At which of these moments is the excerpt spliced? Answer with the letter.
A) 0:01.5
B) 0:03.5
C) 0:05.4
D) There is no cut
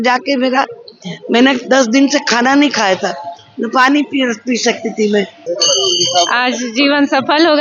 C